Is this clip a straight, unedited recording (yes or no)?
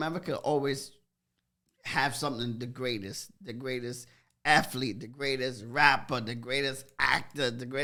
yes